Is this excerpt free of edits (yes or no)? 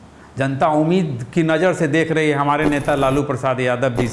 yes